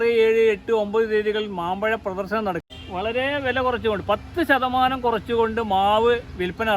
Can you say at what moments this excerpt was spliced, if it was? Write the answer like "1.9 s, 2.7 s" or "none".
2.7 s

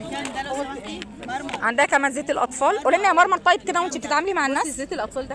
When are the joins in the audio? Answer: none

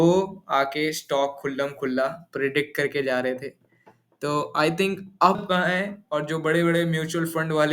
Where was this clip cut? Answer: 5.4 s

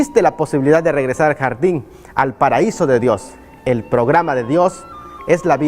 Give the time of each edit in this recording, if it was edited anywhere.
none

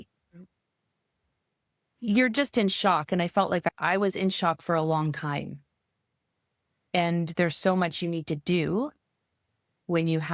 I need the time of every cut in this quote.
3.7 s

